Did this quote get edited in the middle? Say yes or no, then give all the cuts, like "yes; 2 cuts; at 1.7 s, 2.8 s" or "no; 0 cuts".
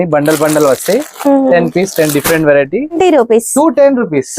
yes; 1 cut; at 3.0 s